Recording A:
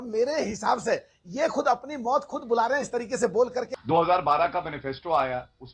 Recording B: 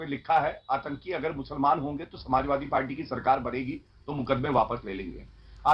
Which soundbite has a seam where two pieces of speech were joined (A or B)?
A